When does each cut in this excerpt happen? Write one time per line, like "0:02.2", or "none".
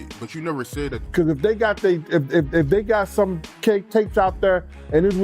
0:01.0